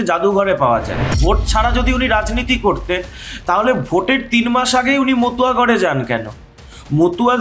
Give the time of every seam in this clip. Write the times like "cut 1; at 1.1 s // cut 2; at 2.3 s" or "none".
cut 1; at 1.2 s